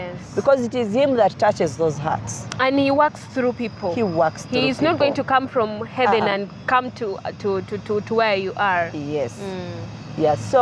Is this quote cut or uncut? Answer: uncut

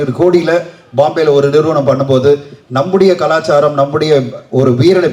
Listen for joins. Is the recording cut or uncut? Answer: uncut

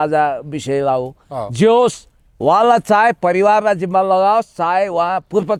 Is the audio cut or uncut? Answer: uncut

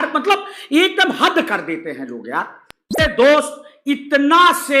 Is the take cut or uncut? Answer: cut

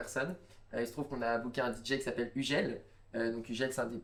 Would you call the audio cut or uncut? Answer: uncut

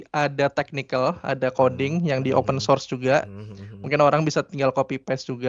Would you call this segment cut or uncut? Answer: uncut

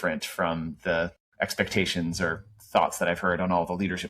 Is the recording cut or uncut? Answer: cut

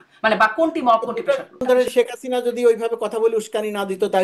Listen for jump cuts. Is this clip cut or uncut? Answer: cut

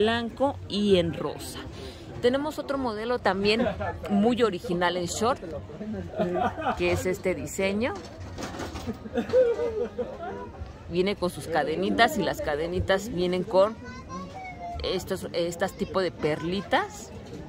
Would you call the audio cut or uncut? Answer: uncut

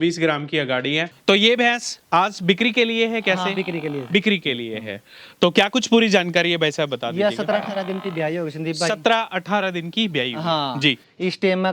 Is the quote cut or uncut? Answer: cut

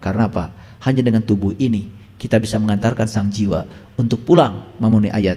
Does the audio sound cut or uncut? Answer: uncut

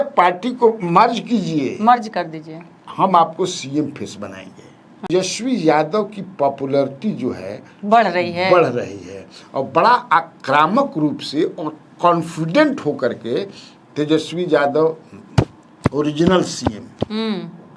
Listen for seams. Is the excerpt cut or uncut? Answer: cut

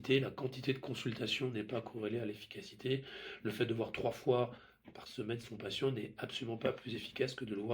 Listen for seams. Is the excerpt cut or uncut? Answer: uncut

